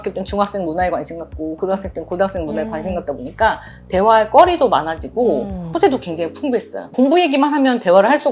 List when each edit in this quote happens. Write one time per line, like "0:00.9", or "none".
0:05.6
0:06.9